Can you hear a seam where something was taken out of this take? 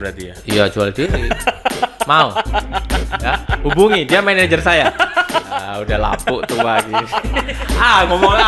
yes; 2 cuts; at 5.6 s, 7.5 s

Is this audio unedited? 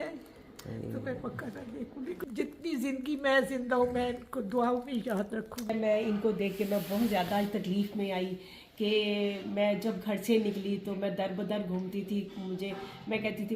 no; 2 cuts; at 2.5 s, 6.1 s

